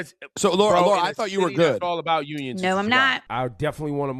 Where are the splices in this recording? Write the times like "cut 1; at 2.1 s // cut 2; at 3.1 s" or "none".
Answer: cut 1; at 3.2 s